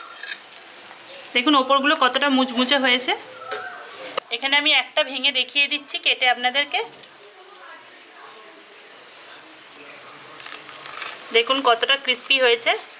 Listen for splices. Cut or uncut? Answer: uncut